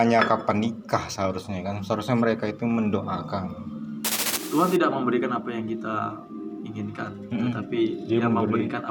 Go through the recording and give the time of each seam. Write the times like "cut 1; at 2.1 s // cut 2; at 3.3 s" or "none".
cut 1; at 4.3 s